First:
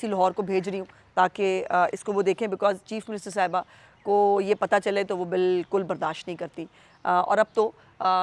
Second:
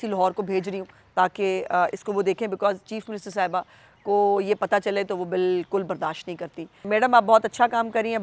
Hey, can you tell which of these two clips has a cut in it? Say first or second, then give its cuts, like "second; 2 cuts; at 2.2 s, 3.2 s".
second; 1 cut; at 6.8 s